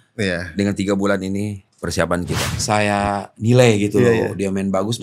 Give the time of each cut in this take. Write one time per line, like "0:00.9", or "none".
0:02.5